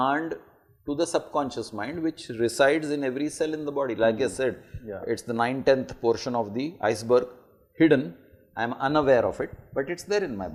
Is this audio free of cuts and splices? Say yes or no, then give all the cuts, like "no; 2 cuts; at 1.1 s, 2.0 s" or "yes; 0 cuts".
yes; 0 cuts